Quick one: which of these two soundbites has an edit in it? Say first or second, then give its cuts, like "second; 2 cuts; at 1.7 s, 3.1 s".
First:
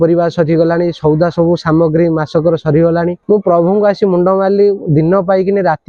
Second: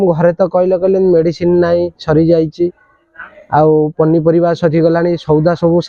first; 1 cut; at 3.2 s